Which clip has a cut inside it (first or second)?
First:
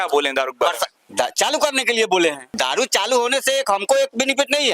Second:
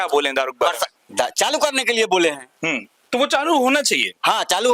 first